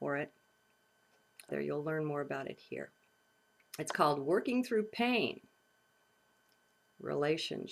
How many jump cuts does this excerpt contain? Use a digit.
0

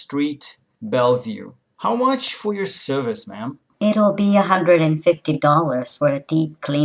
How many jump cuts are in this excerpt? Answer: 1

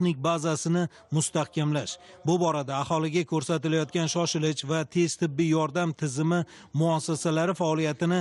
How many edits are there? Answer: 0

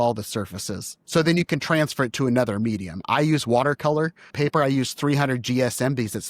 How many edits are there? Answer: 1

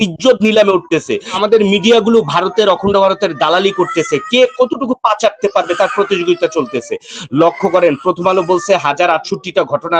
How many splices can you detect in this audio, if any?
1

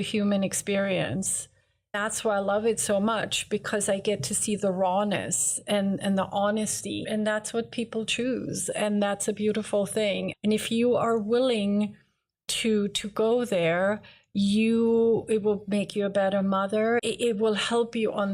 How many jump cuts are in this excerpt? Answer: 4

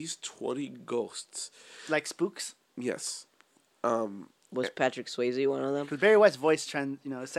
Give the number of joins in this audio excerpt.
1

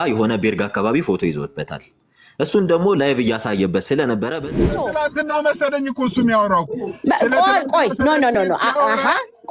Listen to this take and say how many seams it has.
1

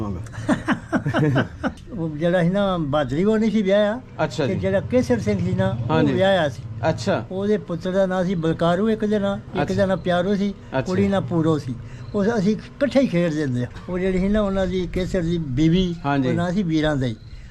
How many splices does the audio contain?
2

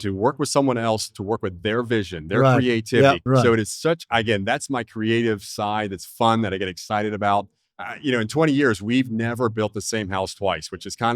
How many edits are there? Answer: 1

